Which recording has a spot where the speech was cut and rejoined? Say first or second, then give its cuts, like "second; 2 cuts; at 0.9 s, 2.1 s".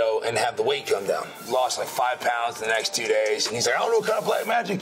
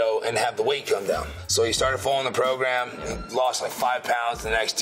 first; 1 cut; at 1.3 s